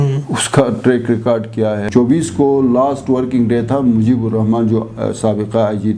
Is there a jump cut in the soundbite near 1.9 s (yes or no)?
yes